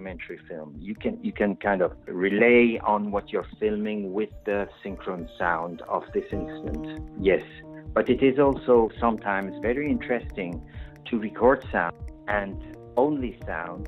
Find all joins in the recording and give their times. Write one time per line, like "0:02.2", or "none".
0:02.1